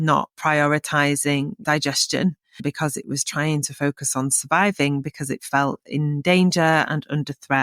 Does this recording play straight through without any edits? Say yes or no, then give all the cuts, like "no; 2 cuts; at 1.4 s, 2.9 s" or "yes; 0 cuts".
yes; 0 cuts